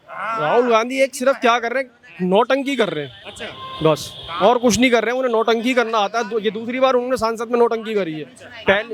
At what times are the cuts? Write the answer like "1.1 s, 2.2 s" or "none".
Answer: none